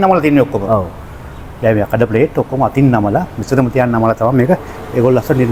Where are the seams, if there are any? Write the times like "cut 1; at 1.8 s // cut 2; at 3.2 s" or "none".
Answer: none